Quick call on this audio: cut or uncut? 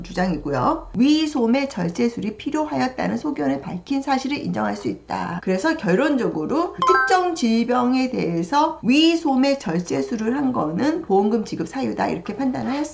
cut